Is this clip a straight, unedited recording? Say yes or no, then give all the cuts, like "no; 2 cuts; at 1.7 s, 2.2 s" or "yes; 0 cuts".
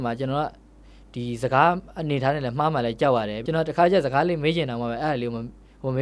no; 1 cut; at 3.4 s